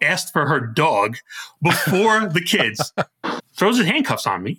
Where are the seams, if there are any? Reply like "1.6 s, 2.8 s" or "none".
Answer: 3.2 s